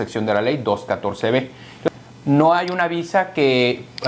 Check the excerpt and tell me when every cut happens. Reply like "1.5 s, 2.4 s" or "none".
1.9 s